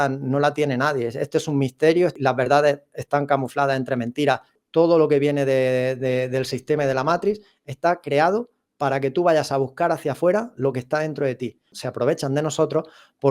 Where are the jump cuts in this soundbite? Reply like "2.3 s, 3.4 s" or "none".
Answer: 2.2 s, 4.6 s, 11.8 s